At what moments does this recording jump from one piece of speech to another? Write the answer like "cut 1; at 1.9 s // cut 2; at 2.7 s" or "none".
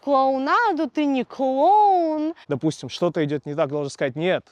cut 1; at 2.4 s